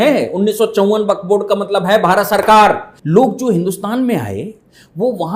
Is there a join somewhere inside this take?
yes; 1 cut; at 2.9 s

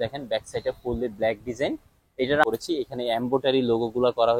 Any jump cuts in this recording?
yes; 1 cut; at 2.4 s

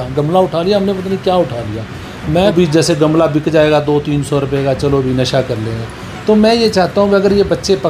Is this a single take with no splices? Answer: no; 1 cut; at 2.5 s

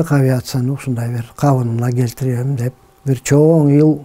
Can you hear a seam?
yes; 1 cut; at 2.9 s

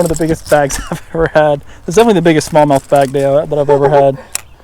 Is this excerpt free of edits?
yes; 0 cuts

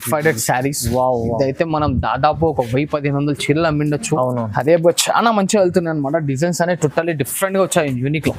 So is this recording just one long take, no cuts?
yes; 0 cuts

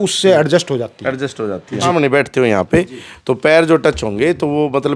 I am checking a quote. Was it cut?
yes; 1 cut; at 1.8 s

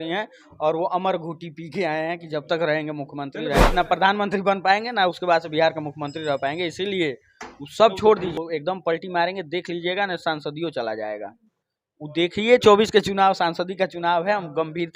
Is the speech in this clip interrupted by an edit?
yes; 2 cuts; at 3.7 s, 8.3 s

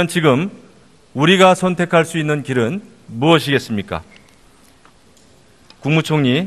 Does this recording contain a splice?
no; 0 cuts

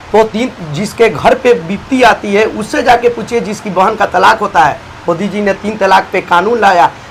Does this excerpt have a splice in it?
no; 0 cuts

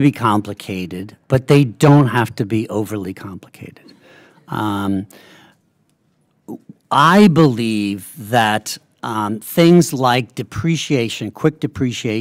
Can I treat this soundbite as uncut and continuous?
yes; 0 cuts

